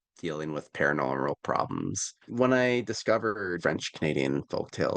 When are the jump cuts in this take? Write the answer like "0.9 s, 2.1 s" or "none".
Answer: 2.2 s, 3.6 s